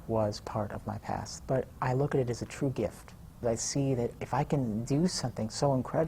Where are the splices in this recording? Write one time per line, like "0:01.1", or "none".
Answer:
0:03.4